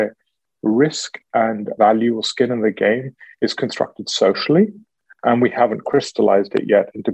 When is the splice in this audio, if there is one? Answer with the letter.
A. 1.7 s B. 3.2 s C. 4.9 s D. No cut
A